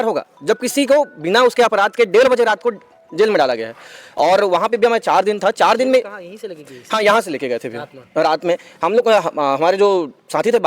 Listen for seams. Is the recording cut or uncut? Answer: uncut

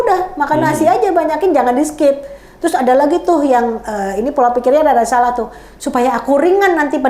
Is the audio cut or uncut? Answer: uncut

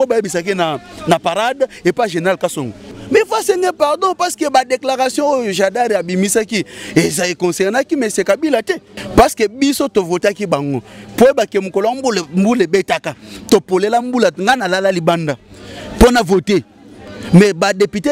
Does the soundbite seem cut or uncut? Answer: cut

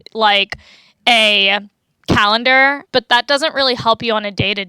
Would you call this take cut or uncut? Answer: cut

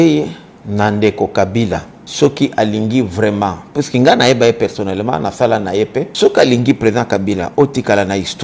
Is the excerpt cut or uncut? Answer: cut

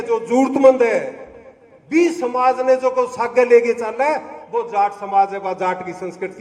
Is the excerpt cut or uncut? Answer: uncut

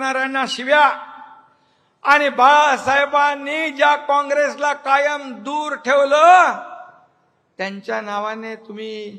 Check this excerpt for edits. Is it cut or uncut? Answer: uncut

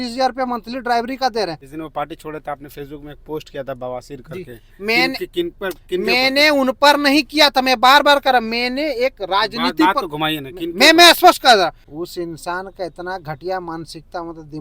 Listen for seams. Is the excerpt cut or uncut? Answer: cut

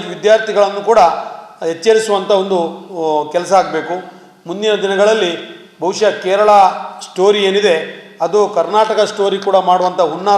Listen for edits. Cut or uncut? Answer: uncut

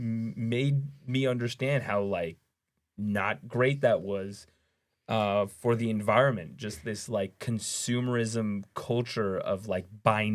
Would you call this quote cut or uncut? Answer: uncut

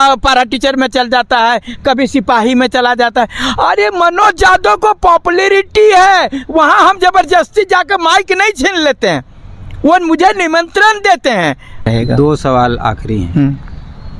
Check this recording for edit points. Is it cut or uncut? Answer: cut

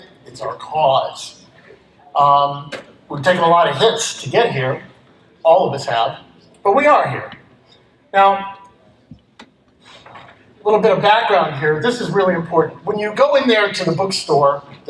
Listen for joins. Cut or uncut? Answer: uncut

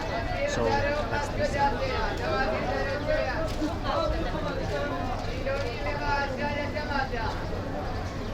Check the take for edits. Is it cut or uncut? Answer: uncut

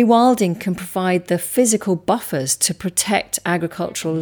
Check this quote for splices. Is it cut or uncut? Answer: uncut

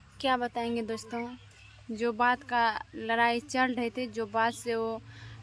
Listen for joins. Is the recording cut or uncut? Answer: uncut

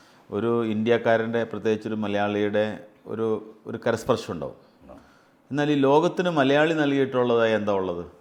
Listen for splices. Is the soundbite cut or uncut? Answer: uncut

